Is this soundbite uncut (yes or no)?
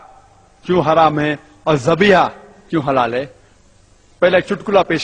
yes